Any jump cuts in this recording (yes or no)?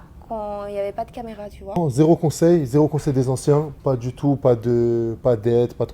yes